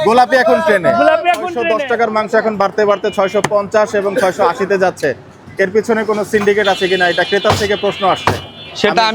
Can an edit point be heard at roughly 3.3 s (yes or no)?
no